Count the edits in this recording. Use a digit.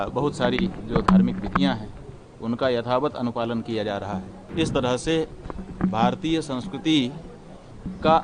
1